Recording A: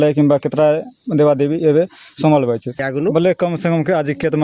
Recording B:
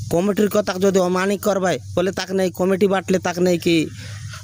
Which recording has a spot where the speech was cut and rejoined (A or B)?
A